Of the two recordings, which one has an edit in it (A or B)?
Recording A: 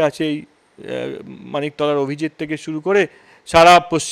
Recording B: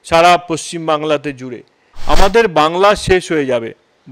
B